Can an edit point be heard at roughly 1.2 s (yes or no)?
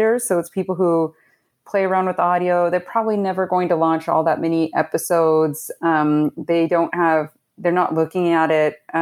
no